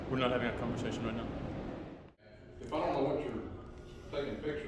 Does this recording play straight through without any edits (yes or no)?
no